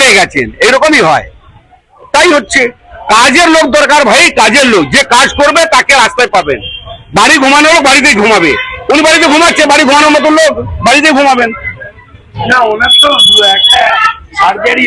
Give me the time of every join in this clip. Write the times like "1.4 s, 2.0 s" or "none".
none